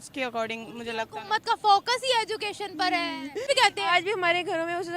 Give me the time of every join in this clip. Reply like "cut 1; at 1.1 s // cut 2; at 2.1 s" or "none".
cut 1; at 3.5 s